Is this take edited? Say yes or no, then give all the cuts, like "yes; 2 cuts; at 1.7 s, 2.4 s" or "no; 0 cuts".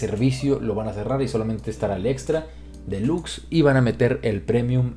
no; 0 cuts